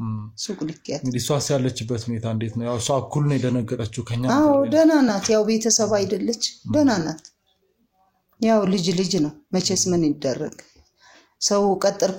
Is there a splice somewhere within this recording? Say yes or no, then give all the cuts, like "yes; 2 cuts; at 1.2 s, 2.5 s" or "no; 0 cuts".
no; 0 cuts